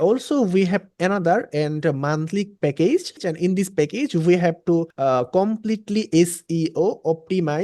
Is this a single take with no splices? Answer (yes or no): no